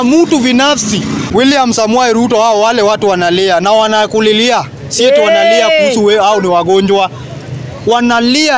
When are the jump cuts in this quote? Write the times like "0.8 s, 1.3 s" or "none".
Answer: 1.3 s